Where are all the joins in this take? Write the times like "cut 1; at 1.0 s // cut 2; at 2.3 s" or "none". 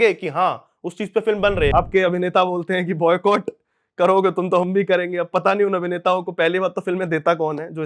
cut 1; at 1.7 s